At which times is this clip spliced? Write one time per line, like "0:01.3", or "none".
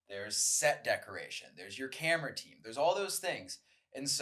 none